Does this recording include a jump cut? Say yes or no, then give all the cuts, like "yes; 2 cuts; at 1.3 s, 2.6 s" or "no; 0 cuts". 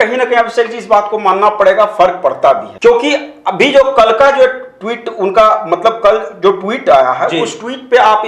yes; 1 cut; at 2.7 s